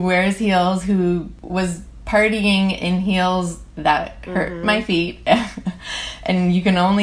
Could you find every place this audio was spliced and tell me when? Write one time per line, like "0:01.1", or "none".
0:01.4